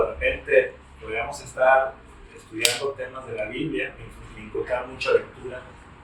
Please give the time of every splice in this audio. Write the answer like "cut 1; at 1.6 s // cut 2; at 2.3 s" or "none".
none